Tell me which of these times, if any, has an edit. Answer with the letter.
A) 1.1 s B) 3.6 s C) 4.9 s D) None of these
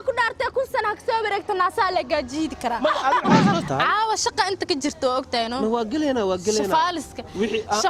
B